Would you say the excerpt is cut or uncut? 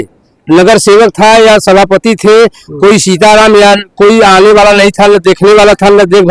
uncut